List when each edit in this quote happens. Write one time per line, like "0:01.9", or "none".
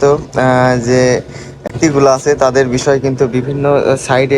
0:01.7